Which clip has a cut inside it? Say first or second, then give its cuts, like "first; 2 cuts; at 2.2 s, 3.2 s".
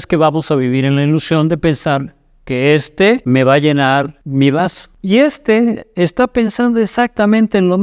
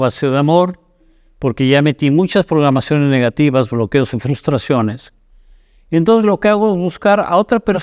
first; 3 cuts; at 3.2 s, 4.2 s, 4.9 s